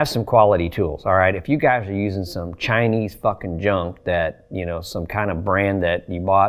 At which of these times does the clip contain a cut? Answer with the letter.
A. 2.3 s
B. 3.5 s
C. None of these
C